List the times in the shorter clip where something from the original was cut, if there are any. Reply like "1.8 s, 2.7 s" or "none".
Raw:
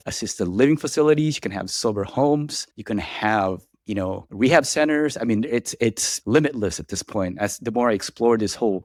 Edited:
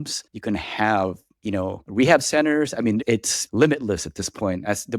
3.0 s